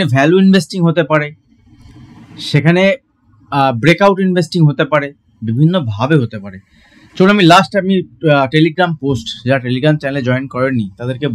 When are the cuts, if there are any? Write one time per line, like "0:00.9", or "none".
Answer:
none